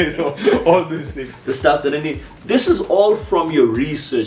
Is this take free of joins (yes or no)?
no